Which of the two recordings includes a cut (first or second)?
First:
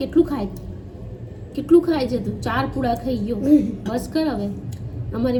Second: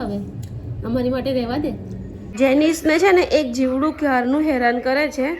second